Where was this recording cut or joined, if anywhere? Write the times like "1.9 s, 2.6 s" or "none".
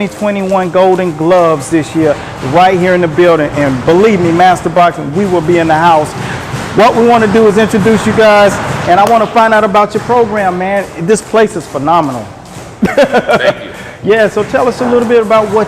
10.2 s